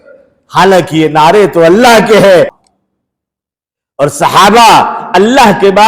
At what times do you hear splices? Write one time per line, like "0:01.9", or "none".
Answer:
0:02.6